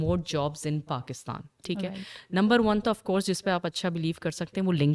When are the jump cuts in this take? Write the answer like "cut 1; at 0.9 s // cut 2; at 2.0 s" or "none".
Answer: none